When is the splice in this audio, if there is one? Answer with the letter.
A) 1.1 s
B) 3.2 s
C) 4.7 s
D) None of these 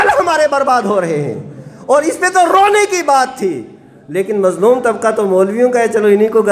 D